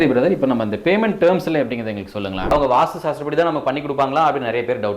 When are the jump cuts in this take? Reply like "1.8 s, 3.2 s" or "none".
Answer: 2.5 s